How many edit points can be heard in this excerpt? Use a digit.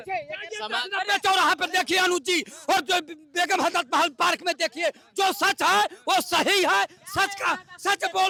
0